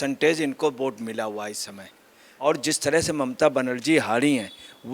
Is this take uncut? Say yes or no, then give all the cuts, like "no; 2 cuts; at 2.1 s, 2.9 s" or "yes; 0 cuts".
no; 1 cut; at 2.4 s